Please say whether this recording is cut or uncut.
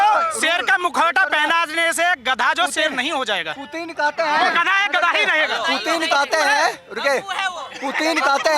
uncut